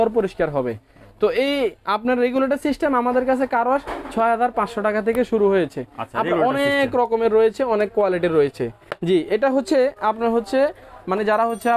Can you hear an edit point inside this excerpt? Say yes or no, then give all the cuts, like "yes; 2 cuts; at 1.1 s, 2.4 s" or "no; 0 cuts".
no; 0 cuts